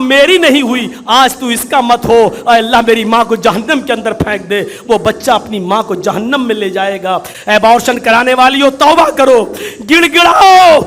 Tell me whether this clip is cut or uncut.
cut